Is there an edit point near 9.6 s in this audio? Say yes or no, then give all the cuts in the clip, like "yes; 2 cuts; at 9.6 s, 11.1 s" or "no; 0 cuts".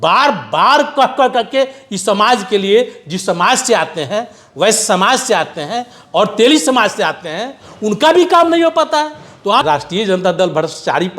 yes; 1 cut; at 9.6 s